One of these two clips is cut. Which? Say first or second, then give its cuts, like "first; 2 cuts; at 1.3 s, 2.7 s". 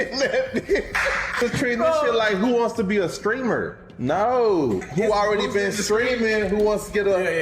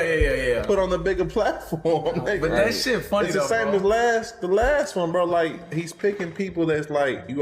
first; 1 cut; at 1.4 s